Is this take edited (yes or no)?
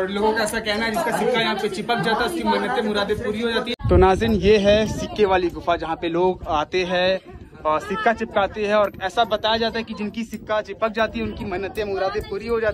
yes